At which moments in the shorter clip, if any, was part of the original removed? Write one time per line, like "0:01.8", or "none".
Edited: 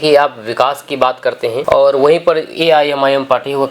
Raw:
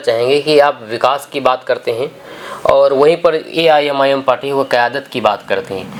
0:01.6